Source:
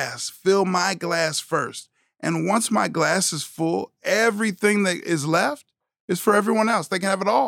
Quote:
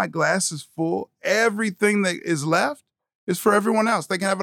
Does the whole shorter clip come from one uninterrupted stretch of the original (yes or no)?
yes